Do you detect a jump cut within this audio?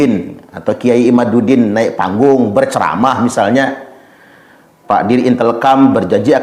no; 0 cuts

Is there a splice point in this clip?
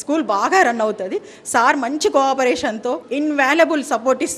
yes; 1 cut; at 3.0 s

